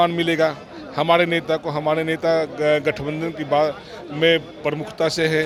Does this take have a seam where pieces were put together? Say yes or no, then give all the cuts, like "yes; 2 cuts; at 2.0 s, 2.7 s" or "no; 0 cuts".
no; 0 cuts